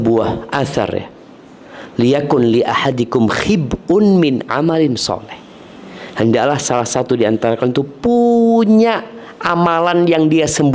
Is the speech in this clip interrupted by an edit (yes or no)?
no